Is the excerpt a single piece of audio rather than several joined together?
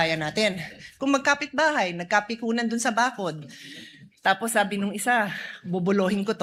yes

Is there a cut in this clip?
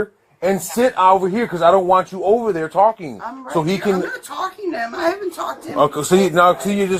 no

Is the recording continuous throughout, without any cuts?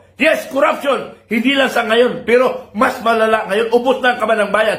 yes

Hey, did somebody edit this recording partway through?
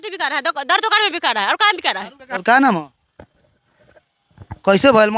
yes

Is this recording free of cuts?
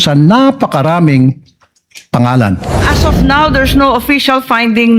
no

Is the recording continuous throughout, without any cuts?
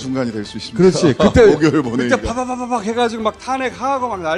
yes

